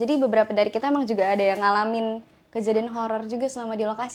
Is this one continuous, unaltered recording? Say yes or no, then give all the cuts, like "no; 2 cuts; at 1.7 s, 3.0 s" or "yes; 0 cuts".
yes; 0 cuts